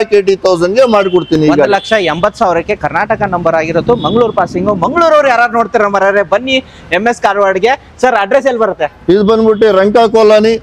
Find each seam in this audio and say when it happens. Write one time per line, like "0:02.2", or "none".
none